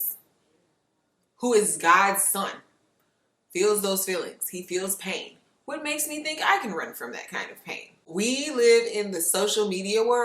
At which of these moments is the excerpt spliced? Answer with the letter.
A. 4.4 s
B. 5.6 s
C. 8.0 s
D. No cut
C